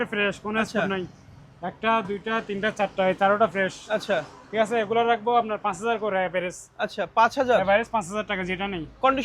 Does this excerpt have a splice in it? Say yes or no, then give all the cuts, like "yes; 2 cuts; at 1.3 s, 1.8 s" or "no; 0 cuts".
no; 0 cuts